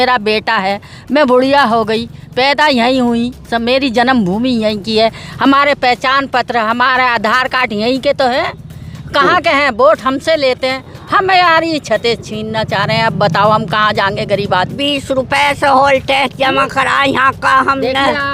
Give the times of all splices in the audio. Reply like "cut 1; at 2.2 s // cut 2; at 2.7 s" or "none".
cut 1; at 14.8 s